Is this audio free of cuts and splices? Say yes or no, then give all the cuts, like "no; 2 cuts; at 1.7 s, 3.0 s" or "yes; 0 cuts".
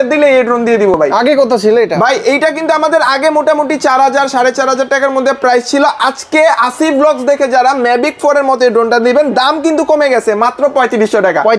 yes; 0 cuts